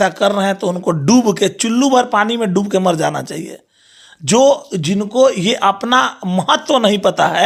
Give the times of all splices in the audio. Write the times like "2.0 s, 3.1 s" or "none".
none